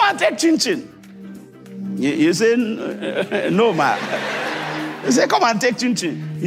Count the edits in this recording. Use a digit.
0